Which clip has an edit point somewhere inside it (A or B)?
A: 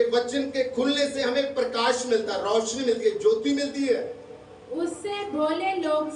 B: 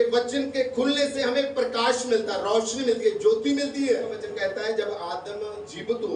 B